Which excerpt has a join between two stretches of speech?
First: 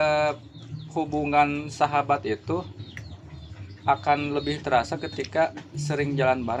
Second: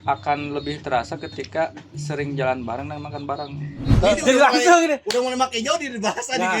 second; 1 cut; at 4.0 s

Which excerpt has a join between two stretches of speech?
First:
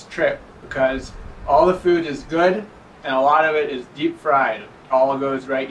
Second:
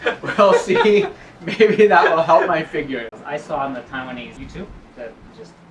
second; 2 cuts; at 3.1 s, 4.3 s

